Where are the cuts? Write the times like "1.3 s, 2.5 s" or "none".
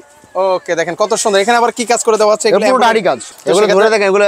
3.2 s